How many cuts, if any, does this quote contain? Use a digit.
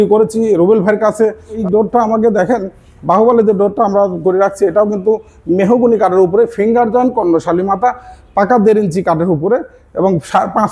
1